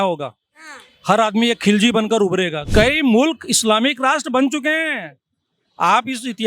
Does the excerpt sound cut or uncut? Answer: cut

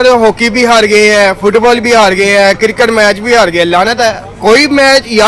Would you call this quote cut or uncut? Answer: uncut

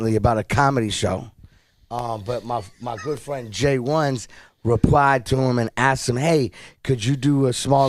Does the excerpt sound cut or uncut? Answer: cut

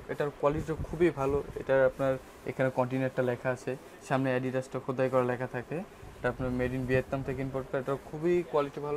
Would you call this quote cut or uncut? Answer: uncut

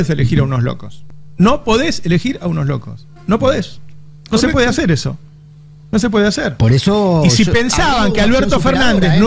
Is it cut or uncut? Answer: uncut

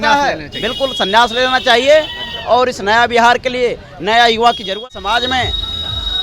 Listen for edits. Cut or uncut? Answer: cut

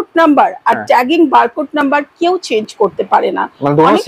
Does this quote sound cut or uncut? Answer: uncut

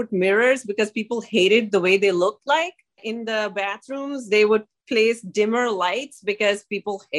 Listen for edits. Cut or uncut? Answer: cut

